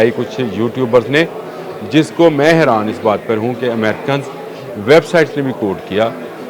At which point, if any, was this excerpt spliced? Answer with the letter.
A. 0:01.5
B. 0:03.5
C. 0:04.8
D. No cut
D